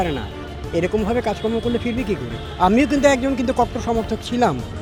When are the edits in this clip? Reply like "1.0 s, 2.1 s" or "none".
none